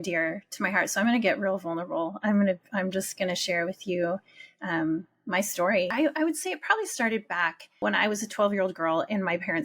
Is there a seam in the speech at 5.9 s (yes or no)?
yes